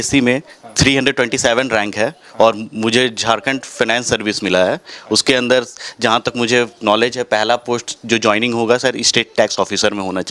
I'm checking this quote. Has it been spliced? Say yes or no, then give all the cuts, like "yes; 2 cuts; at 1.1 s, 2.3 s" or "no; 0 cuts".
no; 0 cuts